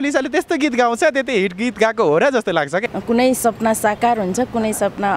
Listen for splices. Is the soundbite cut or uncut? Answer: cut